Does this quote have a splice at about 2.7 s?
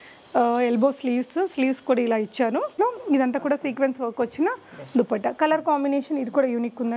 yes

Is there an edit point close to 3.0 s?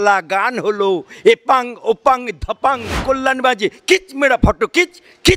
yes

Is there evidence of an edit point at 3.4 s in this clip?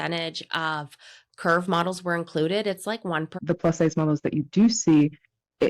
yes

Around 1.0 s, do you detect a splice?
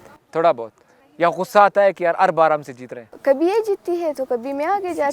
yes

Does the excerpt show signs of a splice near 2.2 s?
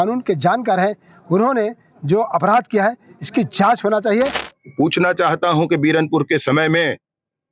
no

